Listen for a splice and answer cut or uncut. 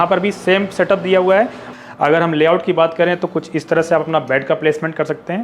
cut